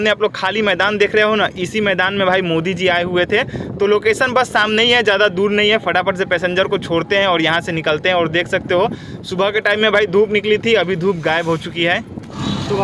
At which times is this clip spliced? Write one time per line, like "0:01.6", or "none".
none

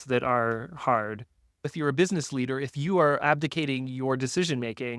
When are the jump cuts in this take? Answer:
0:01.7
0:03.2

